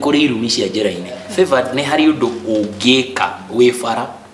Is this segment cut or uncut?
cut